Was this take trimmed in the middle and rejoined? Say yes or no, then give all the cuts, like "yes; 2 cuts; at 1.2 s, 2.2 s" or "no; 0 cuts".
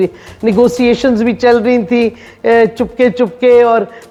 no; 0 cuts